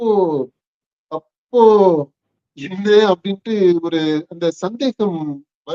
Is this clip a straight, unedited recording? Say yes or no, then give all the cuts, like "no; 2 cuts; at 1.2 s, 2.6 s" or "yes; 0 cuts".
yes; 0 cuts